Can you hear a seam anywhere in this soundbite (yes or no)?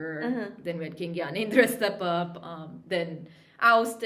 no